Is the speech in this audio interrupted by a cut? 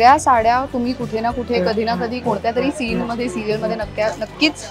no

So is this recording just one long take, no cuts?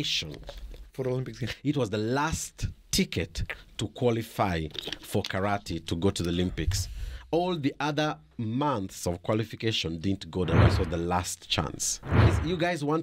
no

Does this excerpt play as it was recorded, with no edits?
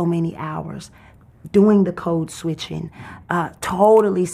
yes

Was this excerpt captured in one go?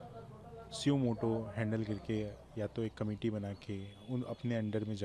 yes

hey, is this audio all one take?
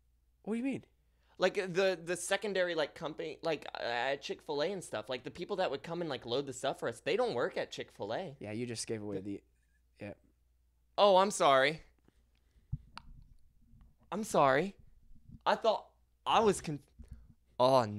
yes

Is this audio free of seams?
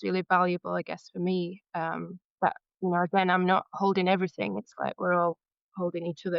yes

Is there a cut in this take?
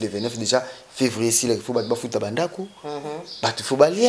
no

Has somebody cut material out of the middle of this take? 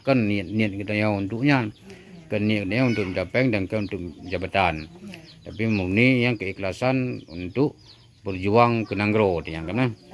no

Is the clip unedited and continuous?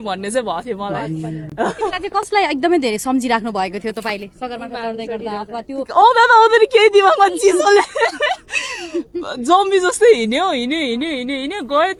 yes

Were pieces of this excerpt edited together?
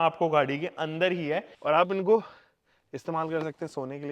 yes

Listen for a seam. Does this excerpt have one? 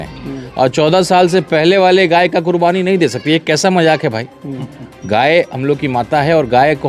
no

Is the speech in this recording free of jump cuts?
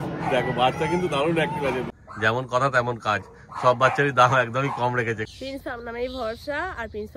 no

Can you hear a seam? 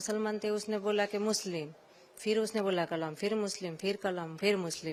no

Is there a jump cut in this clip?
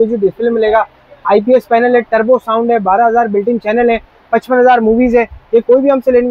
no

